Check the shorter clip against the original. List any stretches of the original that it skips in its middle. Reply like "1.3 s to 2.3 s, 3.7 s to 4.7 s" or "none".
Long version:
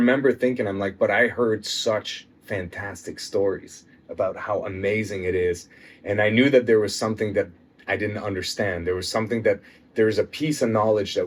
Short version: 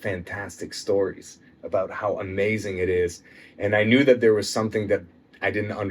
none

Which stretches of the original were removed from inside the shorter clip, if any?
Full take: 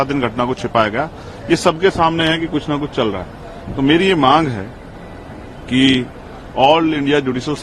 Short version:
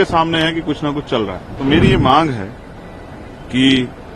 3.3 s to 3.6 s

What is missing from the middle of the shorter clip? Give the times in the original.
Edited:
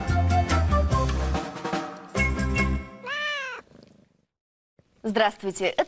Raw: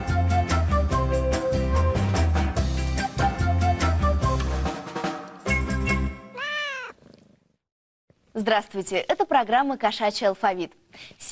1.1 s to 4.4 s

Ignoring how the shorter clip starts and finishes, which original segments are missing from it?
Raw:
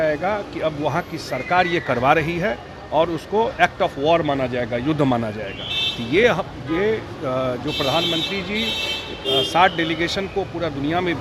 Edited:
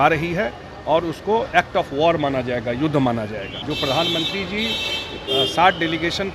5.7 s to 7.6 s

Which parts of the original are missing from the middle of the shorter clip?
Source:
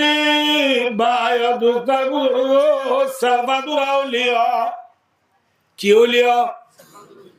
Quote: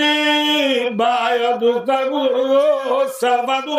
none

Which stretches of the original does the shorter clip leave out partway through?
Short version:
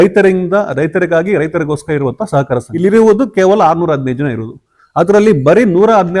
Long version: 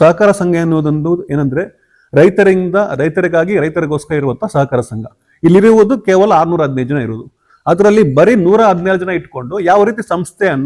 4.9 s to 5.4 s

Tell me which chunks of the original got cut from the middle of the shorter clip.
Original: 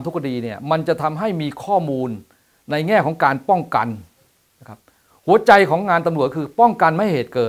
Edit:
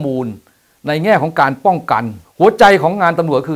4.0 s to 5.1 s

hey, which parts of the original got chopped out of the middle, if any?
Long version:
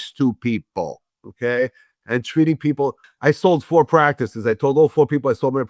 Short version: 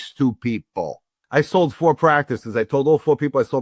1.2 s to 3.1 s

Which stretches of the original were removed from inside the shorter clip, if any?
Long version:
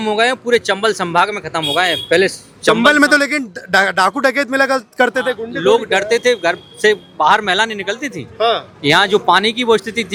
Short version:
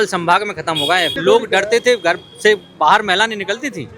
2.0 s to 5.5 s

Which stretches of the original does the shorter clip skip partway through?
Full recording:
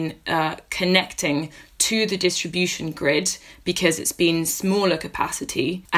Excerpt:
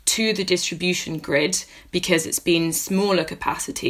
none

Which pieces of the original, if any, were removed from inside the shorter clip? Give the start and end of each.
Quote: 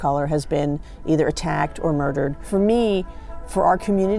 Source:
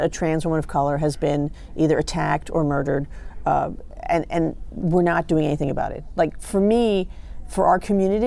3.1 s to 6.4 s

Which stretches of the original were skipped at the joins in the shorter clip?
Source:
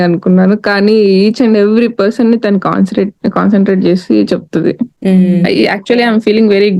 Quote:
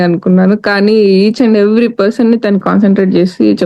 2.6 s to 3.3 s

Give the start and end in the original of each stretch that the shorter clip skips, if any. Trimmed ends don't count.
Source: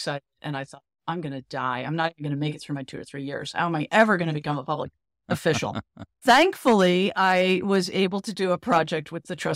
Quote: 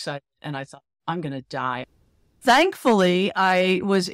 1.9 s to 5.7 s

